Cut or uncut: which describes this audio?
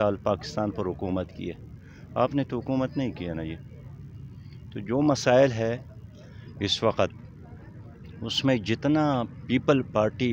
uncut